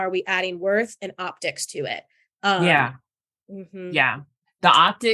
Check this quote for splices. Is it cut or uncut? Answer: uncut